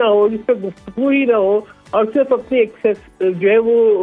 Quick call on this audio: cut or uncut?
uncut